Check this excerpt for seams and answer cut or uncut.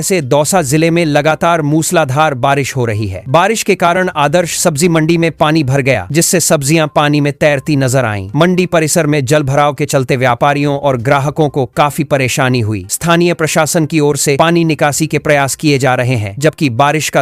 uncut